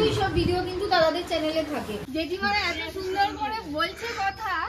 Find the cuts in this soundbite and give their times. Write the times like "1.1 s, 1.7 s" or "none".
2.0 s